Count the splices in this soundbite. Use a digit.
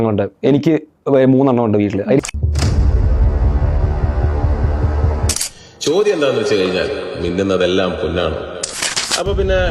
1